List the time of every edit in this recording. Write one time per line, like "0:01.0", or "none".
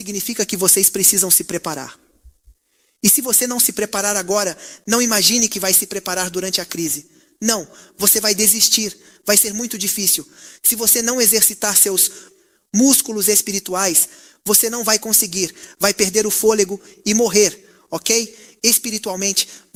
none